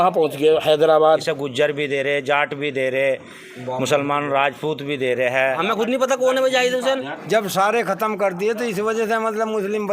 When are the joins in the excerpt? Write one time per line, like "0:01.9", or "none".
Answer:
0:01.3
0:05.6
0:07.1